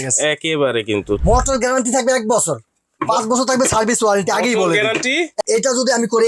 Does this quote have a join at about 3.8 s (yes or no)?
no